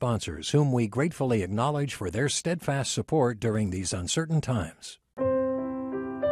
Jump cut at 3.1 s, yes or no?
no